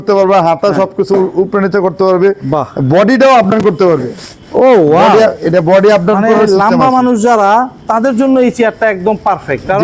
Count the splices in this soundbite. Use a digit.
0